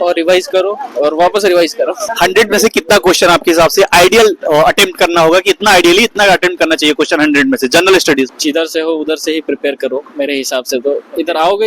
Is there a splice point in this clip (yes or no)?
yes